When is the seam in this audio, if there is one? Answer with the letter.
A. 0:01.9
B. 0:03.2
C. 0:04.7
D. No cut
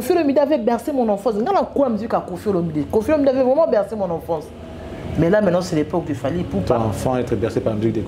D